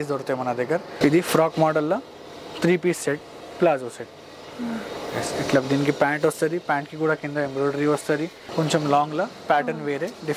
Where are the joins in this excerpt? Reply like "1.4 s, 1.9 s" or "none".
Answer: 1.0 s, 8.4 s